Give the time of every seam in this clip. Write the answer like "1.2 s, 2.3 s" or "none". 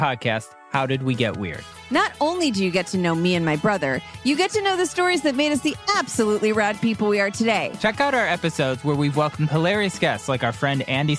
7.8 s